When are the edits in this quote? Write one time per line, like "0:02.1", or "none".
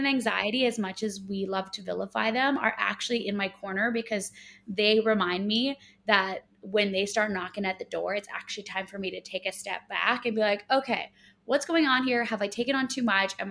none